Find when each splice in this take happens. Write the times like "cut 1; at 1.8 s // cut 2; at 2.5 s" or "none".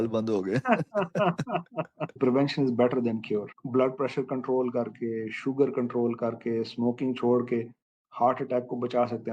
cut 1; at 2.2 s

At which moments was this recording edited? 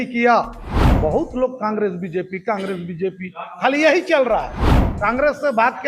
cut 1; at 0.9 s // cut 2; at 4.7 s

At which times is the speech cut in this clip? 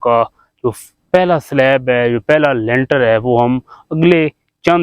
none

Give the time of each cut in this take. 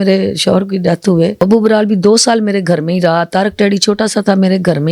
cut 1; at 1.4 s

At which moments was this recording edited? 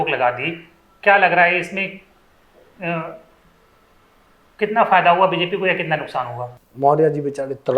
cut 1; at 6.4 s

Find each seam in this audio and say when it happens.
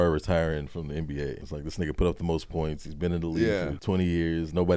cut 1; at 1.5 s // cut 2; at 3.8 s

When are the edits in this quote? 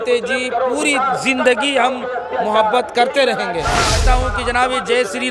cut 1; at 4.0 s

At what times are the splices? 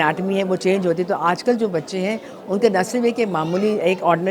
none

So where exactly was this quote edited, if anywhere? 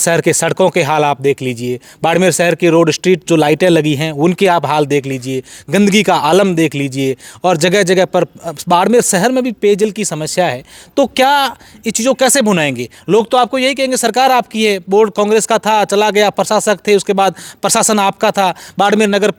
none

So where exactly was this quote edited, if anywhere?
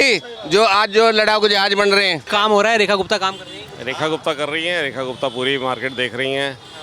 cut 1; at 2.2 s

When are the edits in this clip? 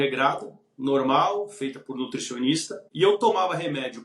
cut 1; at 2.8 s

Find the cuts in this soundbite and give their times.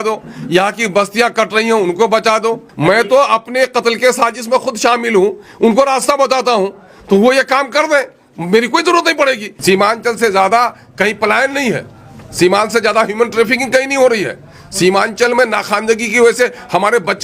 cut 1; at 2.7 s // cut 2; at 9.5 s

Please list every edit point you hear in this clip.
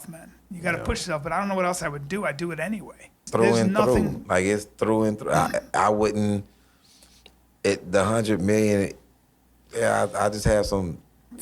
cut 1; at 3.3 s

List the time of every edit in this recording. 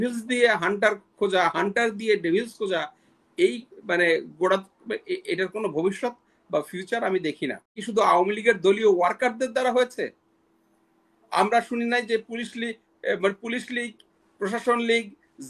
cut 1; at 7.8 s

